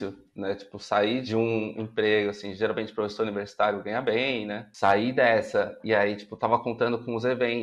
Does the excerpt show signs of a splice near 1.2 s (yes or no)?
yes